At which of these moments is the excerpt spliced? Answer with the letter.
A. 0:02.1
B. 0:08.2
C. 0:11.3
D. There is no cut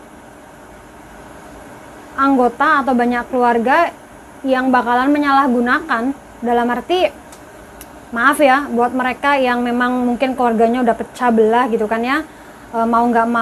D